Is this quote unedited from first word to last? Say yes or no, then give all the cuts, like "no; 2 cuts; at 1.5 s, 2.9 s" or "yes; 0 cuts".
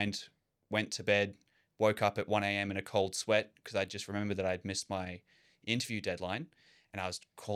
yes; 0 cuts